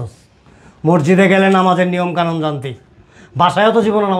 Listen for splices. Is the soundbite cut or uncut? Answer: uncut